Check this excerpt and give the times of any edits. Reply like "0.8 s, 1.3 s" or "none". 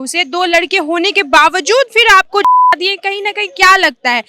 none

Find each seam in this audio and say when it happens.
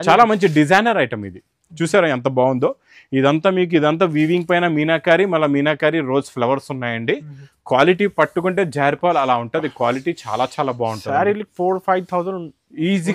none

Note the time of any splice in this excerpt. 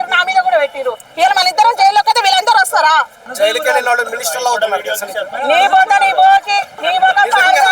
3.2 s, 6.7 s

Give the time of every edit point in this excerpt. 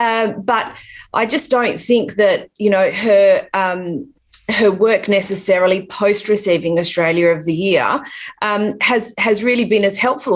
none

